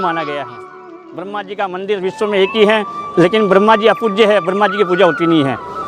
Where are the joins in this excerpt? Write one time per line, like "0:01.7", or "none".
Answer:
0:00.9